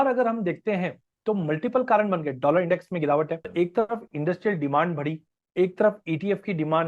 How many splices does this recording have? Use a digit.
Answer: 1